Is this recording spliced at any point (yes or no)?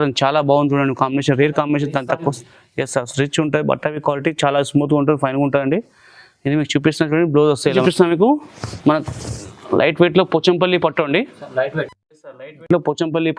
yes